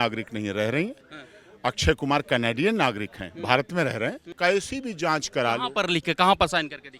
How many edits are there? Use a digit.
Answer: 1